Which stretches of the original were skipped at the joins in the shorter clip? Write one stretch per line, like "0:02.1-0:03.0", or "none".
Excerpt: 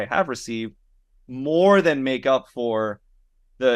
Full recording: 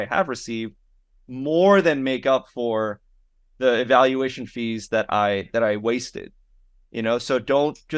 none